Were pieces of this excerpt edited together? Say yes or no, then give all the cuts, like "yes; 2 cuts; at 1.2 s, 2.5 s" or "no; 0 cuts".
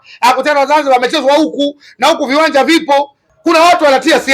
yes; 1 cut; at 3.2 s